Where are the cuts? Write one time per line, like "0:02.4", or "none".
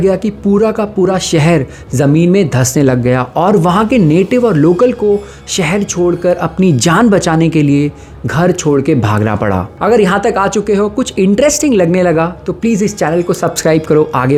none